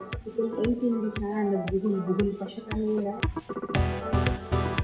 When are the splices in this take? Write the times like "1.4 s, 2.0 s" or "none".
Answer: 3.2 s